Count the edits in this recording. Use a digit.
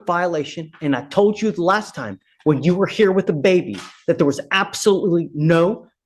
0